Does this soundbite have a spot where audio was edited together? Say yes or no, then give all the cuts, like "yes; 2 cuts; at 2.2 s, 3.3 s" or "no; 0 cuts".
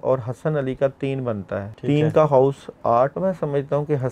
yes; 2 cuts; at 1.7 s, 3.1 s